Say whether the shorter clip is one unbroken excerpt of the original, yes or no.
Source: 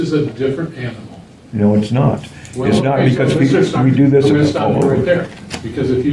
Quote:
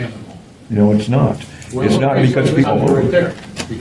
no